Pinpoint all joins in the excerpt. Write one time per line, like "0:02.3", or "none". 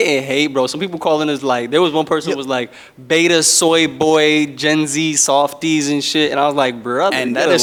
none